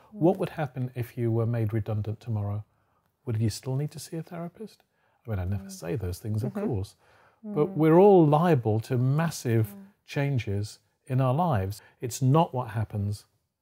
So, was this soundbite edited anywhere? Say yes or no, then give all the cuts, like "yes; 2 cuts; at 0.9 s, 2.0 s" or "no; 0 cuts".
yes; 1 cut; at 11.8 s